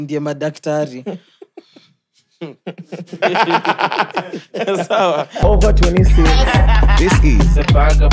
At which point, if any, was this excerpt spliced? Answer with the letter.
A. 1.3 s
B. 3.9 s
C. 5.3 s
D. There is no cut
C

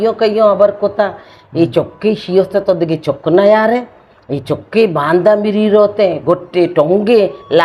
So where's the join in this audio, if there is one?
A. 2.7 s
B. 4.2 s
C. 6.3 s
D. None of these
D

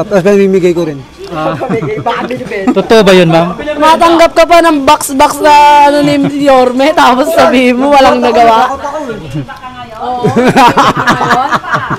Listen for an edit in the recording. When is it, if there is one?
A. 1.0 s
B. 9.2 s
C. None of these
C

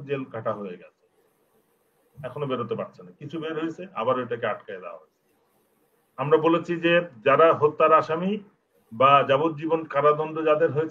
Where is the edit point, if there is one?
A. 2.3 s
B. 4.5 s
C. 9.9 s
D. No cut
D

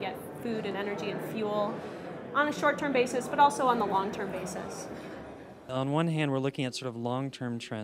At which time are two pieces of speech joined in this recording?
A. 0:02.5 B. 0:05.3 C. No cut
B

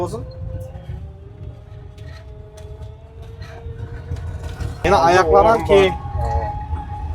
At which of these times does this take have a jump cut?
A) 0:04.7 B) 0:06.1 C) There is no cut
A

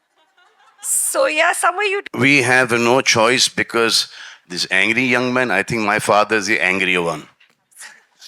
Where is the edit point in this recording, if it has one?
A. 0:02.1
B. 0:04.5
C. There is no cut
A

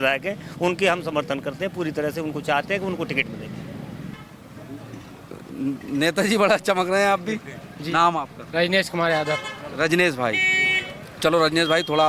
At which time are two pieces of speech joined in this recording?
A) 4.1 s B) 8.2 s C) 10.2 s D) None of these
A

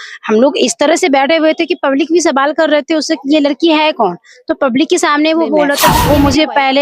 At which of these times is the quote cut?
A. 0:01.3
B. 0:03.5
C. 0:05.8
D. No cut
C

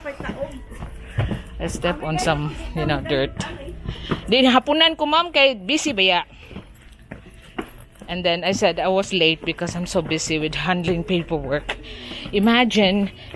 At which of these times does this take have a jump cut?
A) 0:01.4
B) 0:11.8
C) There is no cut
C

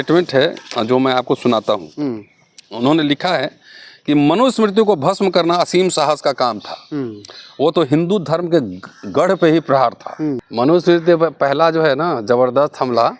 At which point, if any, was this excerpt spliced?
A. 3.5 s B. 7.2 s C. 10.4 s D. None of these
C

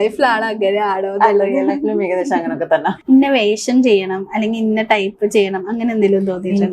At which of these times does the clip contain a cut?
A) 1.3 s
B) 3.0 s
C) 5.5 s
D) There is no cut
B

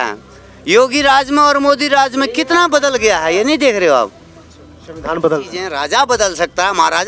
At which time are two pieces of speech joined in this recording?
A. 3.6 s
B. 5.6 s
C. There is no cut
B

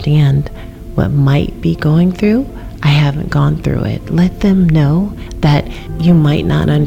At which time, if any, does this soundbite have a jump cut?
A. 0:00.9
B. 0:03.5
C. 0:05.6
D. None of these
C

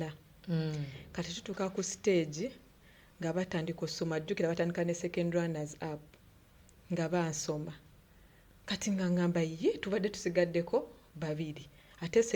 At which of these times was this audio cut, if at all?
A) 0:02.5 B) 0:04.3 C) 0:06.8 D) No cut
D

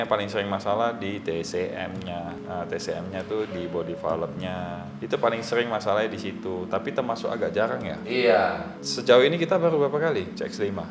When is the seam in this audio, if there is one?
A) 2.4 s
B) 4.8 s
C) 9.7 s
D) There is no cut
D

